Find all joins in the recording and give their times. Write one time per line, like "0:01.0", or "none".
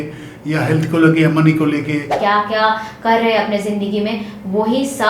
0:02.1